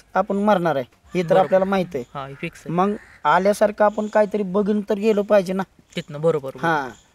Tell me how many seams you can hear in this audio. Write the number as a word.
zero